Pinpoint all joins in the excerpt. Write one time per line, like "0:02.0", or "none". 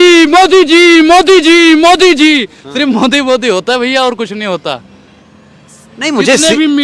none